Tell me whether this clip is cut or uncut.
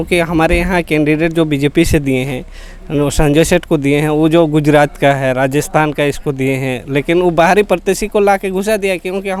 uncut